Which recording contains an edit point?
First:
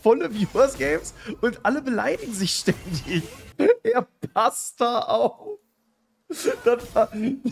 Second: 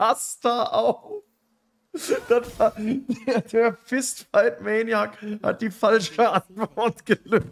first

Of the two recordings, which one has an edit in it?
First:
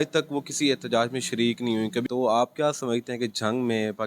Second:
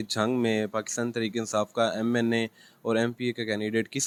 first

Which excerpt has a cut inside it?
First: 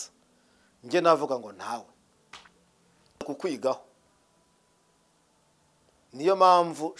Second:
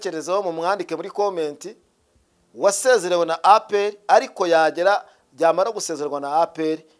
first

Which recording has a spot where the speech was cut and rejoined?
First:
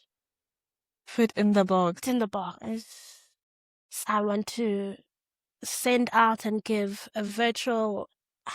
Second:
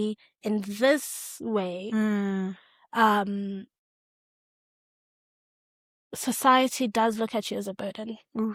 first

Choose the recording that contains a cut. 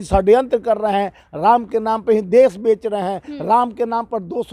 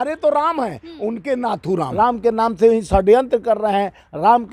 second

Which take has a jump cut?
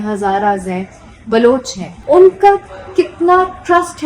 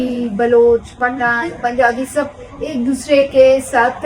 first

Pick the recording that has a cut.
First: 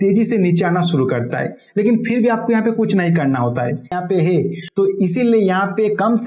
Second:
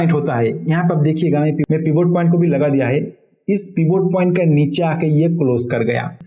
first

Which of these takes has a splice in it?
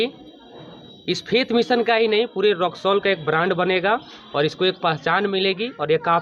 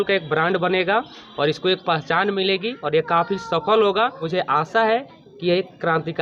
second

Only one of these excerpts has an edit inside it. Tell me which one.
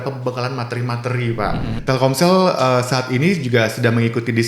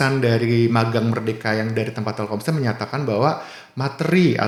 first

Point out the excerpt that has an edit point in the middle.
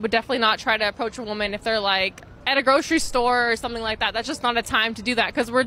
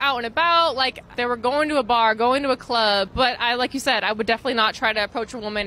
second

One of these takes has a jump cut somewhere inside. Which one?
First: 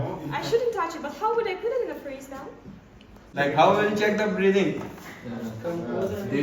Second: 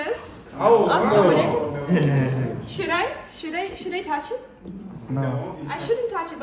first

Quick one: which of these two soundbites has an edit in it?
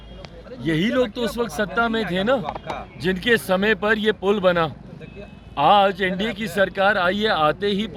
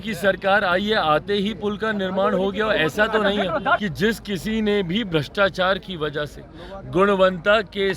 second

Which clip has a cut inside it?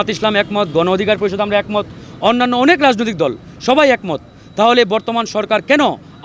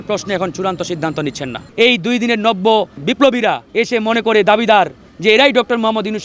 second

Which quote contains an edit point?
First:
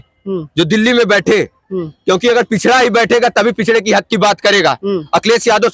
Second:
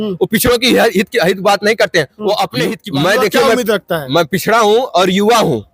second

